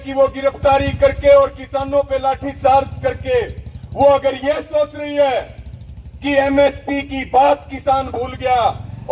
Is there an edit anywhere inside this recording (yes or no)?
no